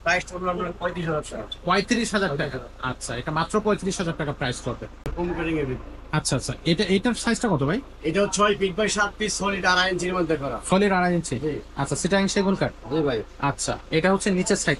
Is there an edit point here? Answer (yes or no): yes